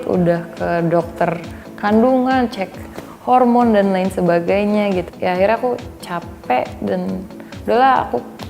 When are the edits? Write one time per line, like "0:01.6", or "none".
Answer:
0:05.1